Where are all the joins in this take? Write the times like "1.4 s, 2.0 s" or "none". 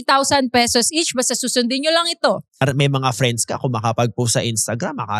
2.6 s